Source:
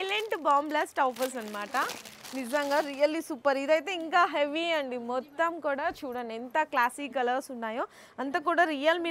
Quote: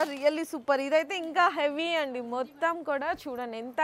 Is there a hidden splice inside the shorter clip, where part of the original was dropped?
no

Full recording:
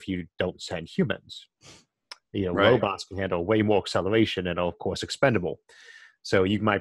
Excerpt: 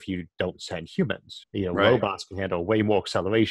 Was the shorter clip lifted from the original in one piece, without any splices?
no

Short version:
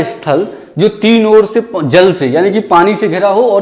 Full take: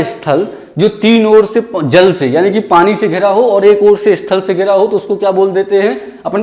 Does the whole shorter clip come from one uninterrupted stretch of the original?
yes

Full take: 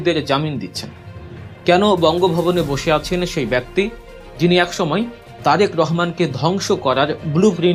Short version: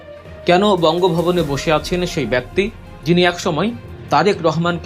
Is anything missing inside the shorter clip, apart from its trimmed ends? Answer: yes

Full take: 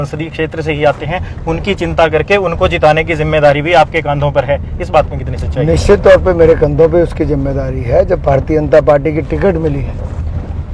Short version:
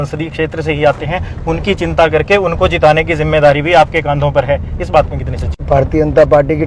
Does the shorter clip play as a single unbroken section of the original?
no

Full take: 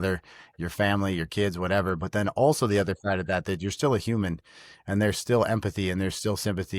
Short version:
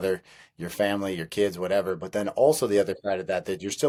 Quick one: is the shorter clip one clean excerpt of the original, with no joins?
yes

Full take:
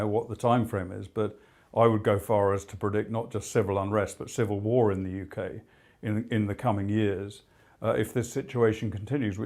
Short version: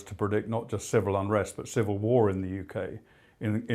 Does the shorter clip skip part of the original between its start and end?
no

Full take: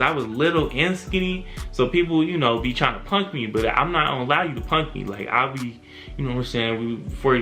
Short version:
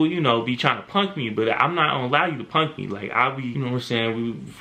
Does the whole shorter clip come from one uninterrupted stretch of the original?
no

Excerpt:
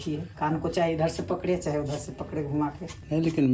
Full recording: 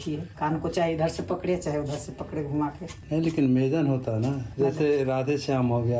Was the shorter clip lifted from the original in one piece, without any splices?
yes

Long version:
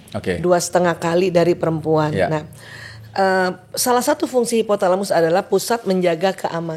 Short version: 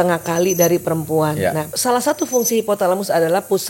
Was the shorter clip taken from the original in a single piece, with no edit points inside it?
no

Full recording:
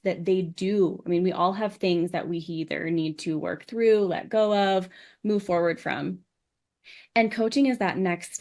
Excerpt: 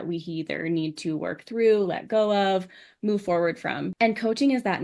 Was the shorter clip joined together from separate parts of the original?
yes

